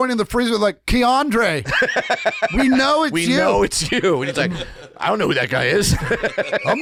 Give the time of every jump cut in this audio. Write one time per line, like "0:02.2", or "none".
none